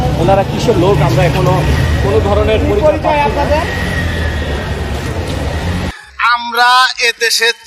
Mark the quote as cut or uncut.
cut